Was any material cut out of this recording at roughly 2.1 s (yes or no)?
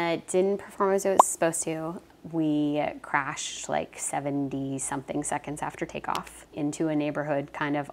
yes